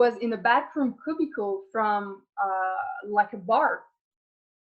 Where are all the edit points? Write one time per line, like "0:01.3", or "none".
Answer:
none